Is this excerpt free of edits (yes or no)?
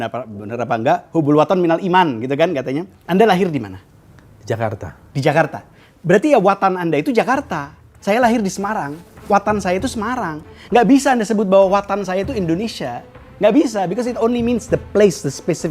no